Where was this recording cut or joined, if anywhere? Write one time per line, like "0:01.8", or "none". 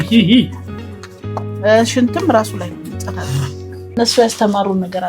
0:04.0